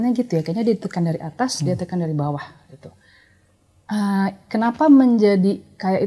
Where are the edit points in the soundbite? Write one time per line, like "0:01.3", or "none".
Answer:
none